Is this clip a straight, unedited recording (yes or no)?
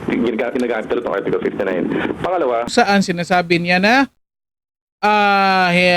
no